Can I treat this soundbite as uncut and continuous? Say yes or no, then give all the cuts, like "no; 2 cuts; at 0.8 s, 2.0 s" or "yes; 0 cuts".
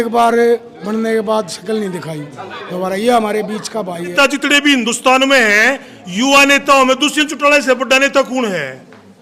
no; 1 cut; at 4.1 s